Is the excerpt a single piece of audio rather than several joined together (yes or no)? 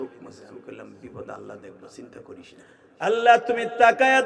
no